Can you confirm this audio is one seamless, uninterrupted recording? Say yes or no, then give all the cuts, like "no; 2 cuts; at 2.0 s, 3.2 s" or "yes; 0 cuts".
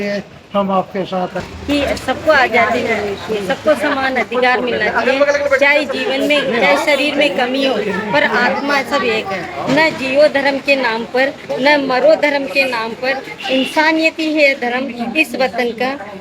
no; 2 cuts; at 1.5 s, 9.6 s